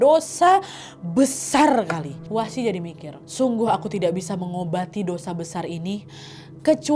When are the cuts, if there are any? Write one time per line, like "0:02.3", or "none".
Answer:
0:02.1